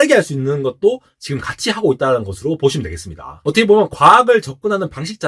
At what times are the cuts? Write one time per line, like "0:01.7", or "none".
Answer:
0:03.3

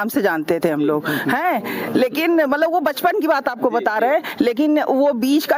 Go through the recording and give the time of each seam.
none

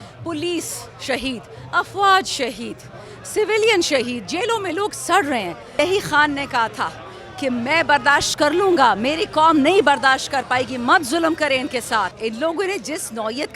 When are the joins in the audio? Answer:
0:05.7
0:12.1

